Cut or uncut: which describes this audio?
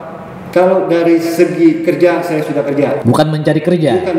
cut